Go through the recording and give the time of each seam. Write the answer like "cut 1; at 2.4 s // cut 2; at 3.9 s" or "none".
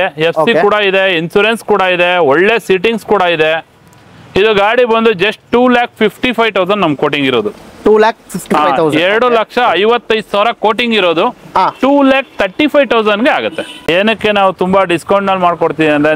cut 1; at 13.9 s